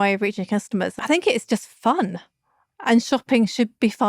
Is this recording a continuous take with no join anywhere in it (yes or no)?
no